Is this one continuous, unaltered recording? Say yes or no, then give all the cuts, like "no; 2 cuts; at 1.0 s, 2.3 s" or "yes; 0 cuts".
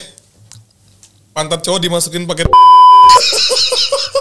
yes; 0 cuts